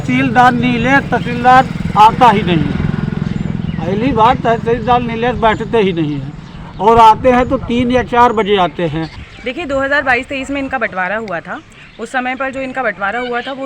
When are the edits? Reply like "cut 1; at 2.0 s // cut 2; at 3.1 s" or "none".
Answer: cut 1; at 9.3 s